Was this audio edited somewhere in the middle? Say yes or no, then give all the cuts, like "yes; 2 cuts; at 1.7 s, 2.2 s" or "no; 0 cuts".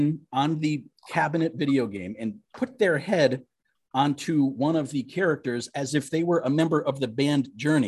no; 0 cuts